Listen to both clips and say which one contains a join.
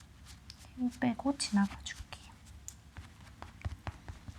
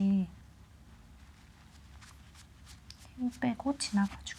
first; 1 cut; at 2.9 s

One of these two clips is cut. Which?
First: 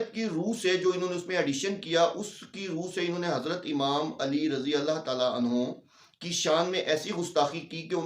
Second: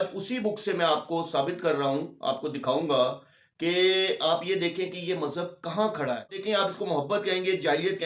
second; 1 cut; at 6.5 s

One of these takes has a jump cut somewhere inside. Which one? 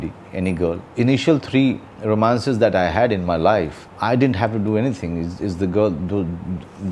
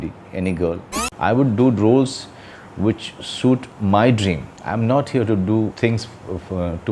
second; 4 cuts; at 0.9 s, 3.7 s, 4.5 s, 5.7 s

